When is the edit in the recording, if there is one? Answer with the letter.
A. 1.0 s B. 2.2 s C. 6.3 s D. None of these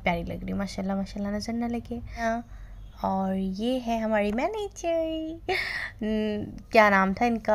B